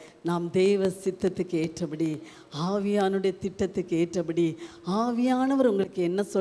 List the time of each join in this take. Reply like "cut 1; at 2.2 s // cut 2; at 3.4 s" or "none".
none